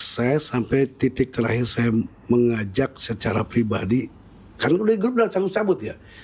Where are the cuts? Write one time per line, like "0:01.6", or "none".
none